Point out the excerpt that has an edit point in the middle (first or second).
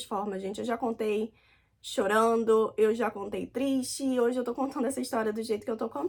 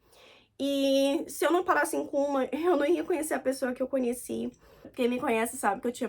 second